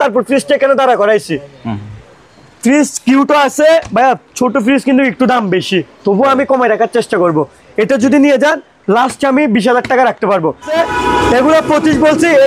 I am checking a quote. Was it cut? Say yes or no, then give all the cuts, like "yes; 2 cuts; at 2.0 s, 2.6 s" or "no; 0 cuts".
yes; 1 cut; at 10.7 s